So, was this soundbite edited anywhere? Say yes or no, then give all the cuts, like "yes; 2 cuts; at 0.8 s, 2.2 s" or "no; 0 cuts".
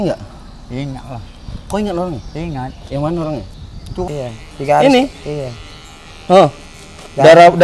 yes; 1 cut; at 3.9 s